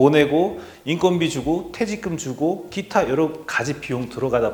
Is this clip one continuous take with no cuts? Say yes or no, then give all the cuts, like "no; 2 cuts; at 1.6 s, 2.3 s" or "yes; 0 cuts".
yes; 0 cuts